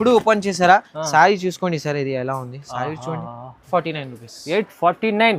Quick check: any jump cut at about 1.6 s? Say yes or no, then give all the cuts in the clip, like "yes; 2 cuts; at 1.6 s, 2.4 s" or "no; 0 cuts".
no; 1 cut; at 3.6 s